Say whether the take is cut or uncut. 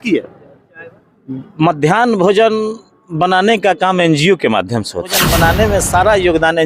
cut